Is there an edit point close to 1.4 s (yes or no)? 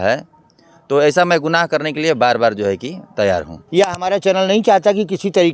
no